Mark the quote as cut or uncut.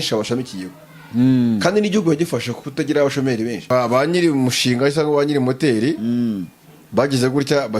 cut